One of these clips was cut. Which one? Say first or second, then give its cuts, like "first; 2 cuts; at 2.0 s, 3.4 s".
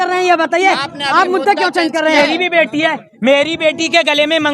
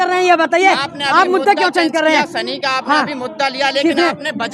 first; 1 cut; at 2.2 s